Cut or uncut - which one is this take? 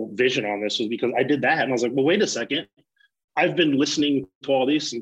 uncut